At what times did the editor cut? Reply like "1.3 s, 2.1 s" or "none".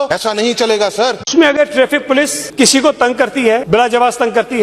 1.2 s